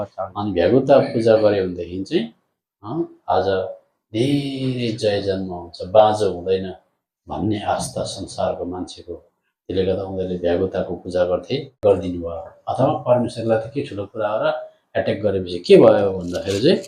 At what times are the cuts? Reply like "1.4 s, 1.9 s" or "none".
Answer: 11.8 s